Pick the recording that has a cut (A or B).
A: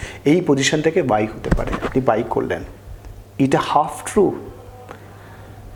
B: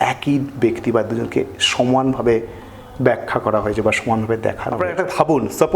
B